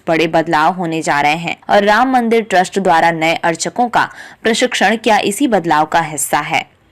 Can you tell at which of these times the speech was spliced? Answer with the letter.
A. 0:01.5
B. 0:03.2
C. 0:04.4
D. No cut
A